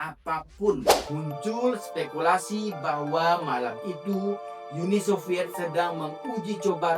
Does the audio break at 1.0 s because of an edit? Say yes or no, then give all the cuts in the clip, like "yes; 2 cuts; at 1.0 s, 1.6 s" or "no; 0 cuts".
yes; 1 cut; at 1.0 s